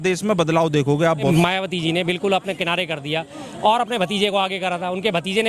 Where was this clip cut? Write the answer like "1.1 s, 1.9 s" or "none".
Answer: 1.3 s